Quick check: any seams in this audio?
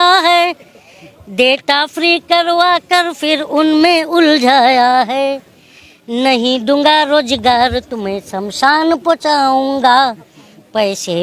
no; 0 cuts

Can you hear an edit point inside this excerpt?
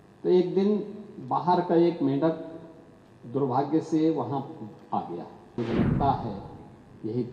yes; 1 cut; at 5.6 s

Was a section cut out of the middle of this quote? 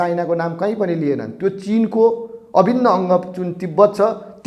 no; 0 cuts

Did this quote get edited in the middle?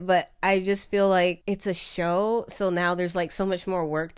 no; 0 cuts

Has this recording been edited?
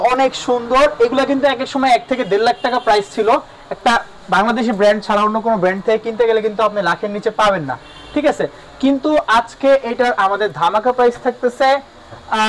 no; 0 cuts

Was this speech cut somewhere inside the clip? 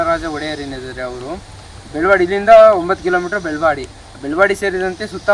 no; 0 cuts

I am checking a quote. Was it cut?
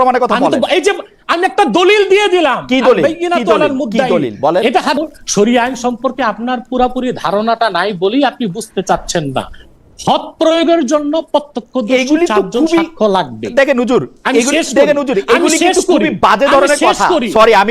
yes; 1 cut; at 5.0 s

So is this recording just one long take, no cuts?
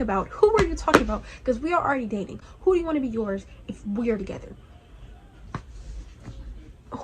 yes; 0 cuts

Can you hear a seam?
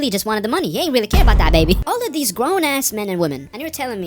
yes; 1 cut; at 1.8 s

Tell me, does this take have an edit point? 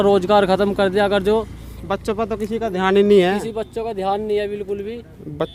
no; 0 cuts

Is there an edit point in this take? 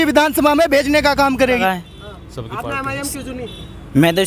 yes; 1 cut; at 1.5 s

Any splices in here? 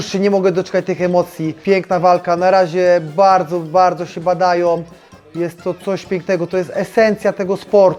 no; 0 cuts

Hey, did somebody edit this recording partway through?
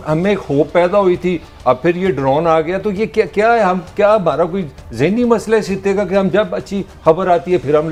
no; 0 cuts

